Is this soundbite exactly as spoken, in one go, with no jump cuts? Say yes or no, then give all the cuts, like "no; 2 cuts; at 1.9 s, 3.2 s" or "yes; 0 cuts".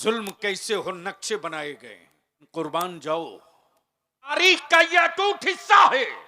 no; 2 cuts; at 2.5 s, 4.3 s